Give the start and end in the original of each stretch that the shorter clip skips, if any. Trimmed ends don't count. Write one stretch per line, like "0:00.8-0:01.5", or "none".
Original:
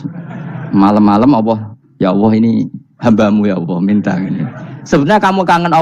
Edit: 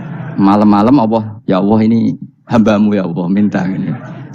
0:01.7-0:01.9

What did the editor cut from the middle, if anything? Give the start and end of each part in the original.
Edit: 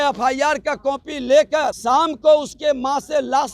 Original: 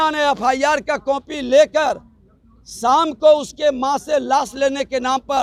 0:02.0-0:02.8

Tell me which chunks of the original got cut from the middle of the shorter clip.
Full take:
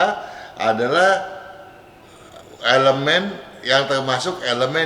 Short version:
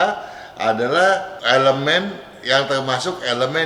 0:01.3-0:02.5

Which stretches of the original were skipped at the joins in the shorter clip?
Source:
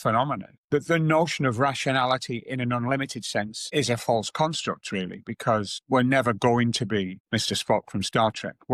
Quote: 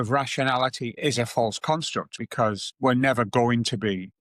0:02.4-0:03.6
0:04.8-0:05.2

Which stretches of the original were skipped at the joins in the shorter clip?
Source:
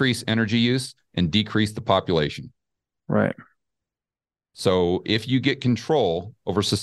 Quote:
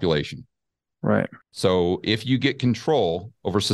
0:03.5-0:04.5

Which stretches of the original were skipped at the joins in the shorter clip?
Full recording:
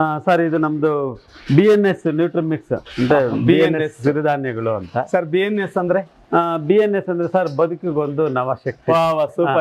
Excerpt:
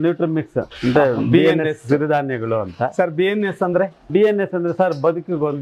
0:06.2-0:06.6

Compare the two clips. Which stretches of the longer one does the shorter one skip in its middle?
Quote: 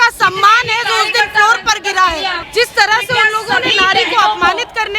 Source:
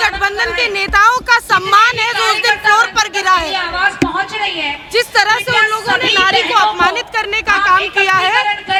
0:03.7-0:04.8

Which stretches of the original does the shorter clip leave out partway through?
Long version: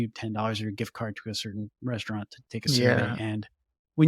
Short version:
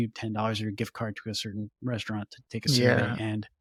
none

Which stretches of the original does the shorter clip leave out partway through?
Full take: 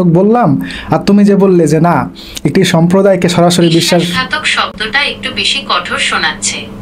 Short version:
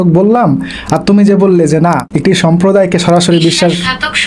0:02.1-0:02.4

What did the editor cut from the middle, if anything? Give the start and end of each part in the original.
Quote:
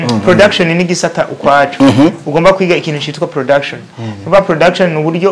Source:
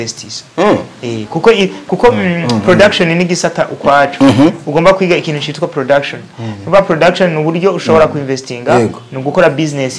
none

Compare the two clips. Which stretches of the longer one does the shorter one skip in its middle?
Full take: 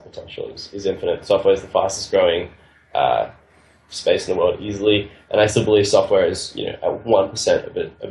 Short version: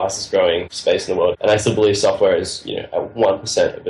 0:02.9-0:05.0

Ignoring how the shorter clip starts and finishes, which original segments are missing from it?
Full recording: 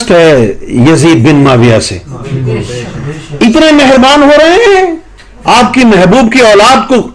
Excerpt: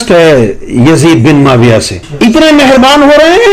0:02.0-0:03.2

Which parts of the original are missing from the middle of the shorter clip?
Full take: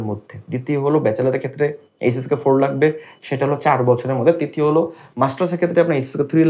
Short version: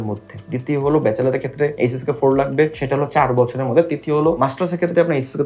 0:01.7-0:02.0
0:03.0-0:03.3
0:04.9-0:05.2

